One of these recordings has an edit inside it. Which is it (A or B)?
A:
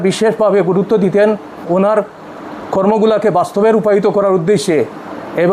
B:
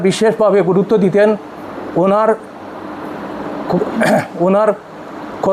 A